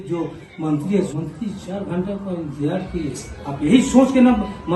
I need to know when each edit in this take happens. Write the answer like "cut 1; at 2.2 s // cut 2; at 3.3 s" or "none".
cut 1; at 1.1 s

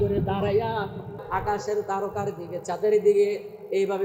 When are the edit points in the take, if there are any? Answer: cut 1; at 1.1 s

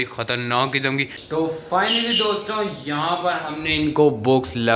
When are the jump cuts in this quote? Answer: cut 1; at 1.2 s

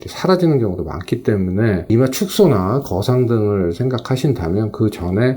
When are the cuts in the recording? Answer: cut 1; at 1.9 s

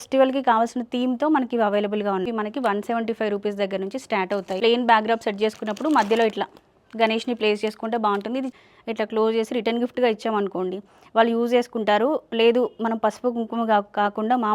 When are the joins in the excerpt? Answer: cut 1; at 2.3 s // cut 2; at 4.6 s // cut 3; at 8.5 s

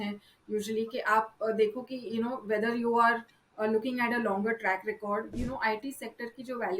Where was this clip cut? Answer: cut 1; at 5.3 s

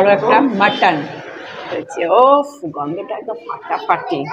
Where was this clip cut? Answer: cut 1; at 1.6 s

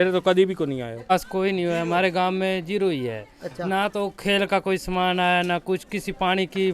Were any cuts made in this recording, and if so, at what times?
cut 1; at 1.1 s

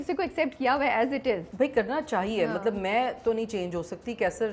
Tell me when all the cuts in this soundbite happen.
cut 1; at 1.5 s

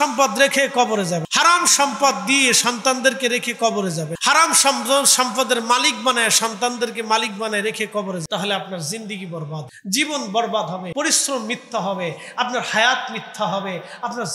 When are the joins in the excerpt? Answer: cut 1; at 1.3 s // cut 2; at 4.1 s // cut 3; at 8.2 s // cut 4; at 9.7 s // cut 5; at 10.9 s

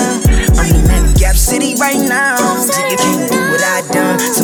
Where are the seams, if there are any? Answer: none

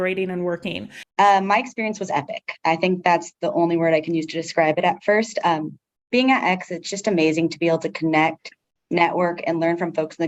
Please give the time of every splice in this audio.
cut 1; at 1.0 s

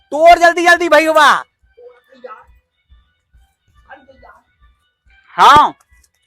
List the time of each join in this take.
none

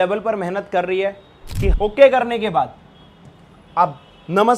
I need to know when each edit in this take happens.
cut 1; at 1.7 s

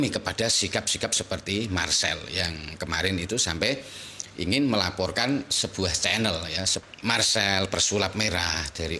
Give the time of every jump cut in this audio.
cut 1; at 6.8 s

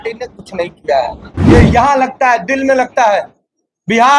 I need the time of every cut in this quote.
cut 1; at 1.3 s

